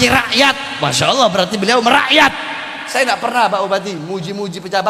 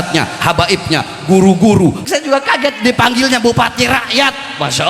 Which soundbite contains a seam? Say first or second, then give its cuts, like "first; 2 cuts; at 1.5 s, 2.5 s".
second; 1 cut; at 2.0 s